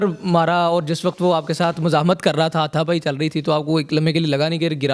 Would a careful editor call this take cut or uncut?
uncut